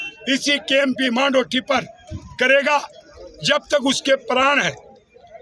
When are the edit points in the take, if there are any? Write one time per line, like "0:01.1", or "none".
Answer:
none